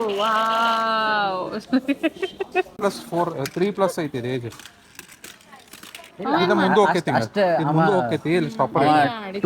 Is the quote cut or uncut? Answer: cut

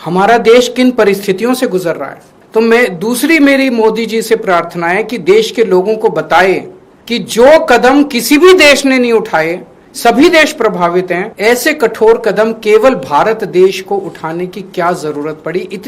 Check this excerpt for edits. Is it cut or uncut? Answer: uncut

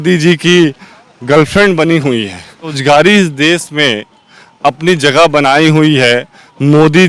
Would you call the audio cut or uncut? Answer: cut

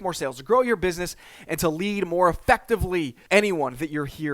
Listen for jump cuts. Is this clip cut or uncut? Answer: cut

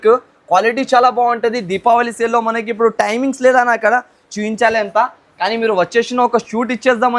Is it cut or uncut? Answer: uncut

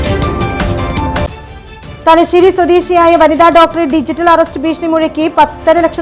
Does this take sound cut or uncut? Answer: uncut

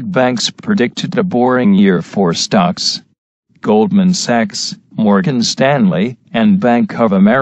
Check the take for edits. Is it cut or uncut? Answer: uncut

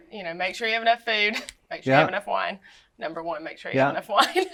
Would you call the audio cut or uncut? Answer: uncut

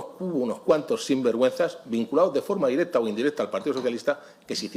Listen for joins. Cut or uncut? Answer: uncut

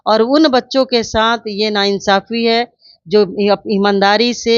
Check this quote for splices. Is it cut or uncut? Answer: uncut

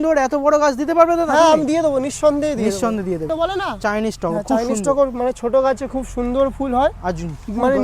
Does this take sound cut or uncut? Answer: cut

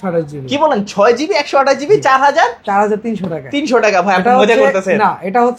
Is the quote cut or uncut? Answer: uncut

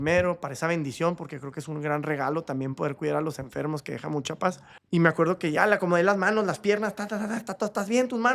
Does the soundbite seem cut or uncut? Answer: cut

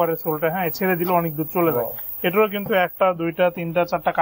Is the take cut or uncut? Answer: uncut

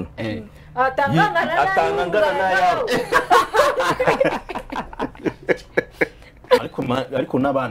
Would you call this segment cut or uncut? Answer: cut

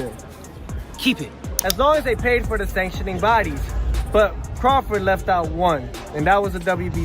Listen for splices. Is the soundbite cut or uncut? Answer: cut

